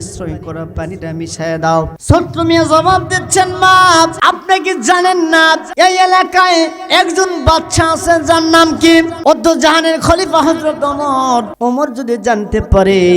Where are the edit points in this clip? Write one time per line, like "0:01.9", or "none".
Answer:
0:02.0
0:04.2
0:05.7
0:09.1
0:11.5